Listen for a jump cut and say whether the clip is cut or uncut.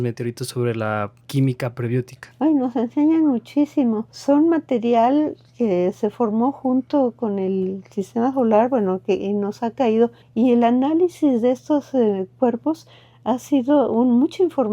cut